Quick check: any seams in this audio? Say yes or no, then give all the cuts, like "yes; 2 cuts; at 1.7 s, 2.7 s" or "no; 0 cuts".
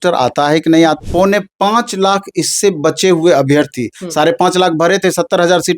yes; 1 cut; at 1.0 s